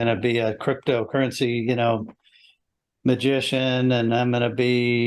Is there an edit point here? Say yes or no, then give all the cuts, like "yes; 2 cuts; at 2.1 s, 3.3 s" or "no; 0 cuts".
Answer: no; 0 cuts